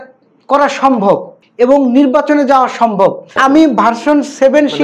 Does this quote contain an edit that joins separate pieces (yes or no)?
yes